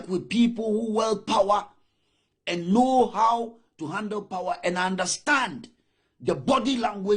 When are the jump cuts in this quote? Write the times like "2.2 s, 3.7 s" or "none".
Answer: none